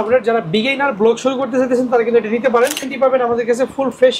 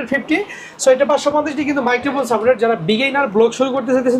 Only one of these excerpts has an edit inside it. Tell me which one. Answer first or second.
first